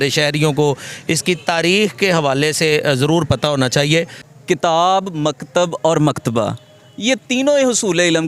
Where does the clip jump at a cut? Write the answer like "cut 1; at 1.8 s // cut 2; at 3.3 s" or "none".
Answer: cut 1; at 4.2 s